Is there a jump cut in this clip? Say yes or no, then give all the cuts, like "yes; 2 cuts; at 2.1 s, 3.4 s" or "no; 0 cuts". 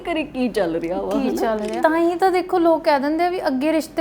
yes; 1 cut; at 1.8 s